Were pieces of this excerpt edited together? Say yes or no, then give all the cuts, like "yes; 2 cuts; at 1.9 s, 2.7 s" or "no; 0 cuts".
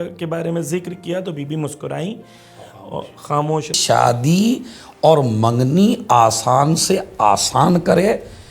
yes; 1 cut; at 3.7 s